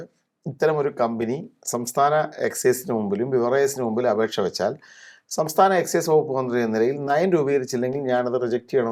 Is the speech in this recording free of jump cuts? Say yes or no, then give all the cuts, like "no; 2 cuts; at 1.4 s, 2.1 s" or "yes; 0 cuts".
yes; 0 cuts